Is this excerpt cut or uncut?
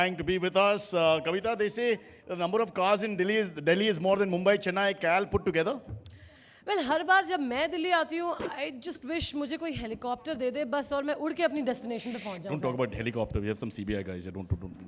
uncut